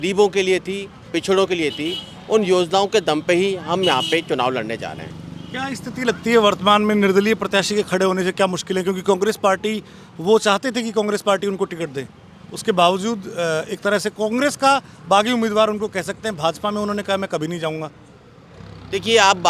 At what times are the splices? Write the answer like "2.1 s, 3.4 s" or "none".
none